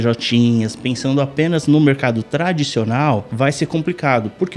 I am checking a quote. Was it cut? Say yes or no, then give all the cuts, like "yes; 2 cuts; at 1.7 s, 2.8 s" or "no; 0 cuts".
yes; 1 cut; at 3.3 s